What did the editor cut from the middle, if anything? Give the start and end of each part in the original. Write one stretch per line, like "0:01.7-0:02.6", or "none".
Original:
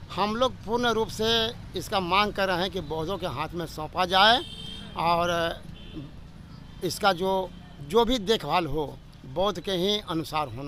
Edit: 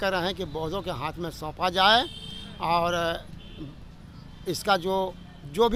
none